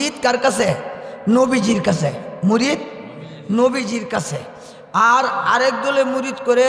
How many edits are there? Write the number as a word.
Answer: zero